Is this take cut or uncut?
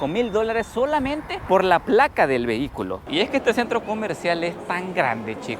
cut